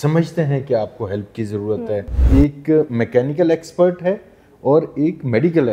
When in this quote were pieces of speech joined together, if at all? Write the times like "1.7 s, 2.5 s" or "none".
2.2 s